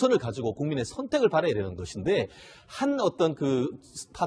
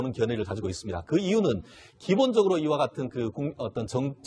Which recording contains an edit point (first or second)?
second